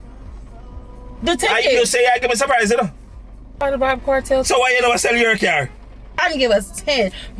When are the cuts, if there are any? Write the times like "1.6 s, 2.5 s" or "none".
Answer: 0.8 s, 3.6 s, 6.2 s